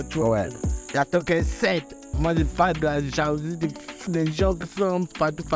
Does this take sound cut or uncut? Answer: cut